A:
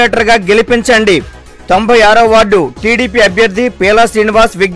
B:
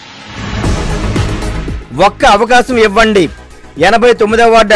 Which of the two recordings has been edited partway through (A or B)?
B